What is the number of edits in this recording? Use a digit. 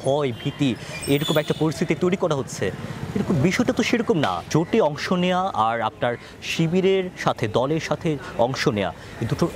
1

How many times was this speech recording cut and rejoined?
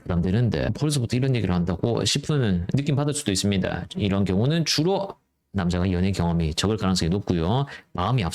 0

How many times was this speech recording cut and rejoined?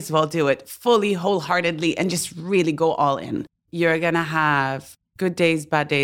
1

